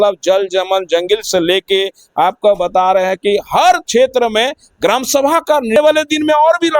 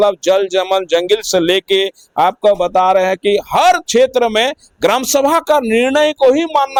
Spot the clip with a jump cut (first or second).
first